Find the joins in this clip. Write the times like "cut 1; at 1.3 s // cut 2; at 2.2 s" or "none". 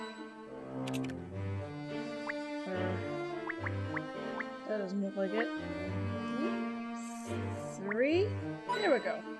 cut 1; at 7.8 s